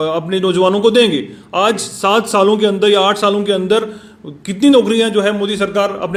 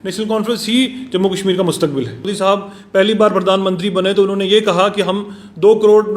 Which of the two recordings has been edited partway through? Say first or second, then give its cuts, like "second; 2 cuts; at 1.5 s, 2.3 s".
second; 1 cut; at 2.3 s